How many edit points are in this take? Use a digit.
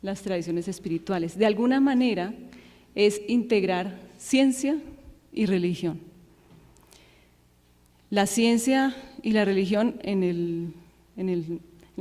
1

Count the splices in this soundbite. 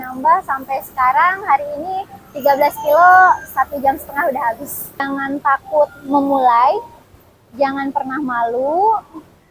1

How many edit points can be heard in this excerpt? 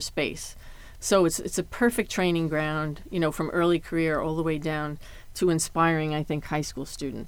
0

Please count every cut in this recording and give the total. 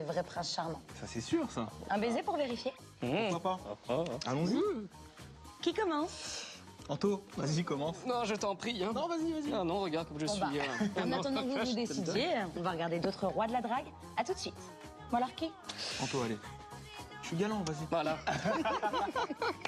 1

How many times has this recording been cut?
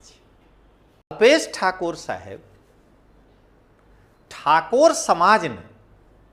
1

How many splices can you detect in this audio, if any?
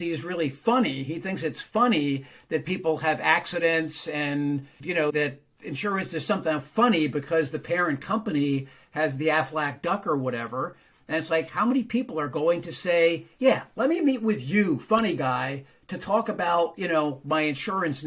0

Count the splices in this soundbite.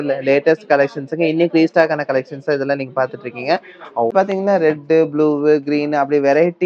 1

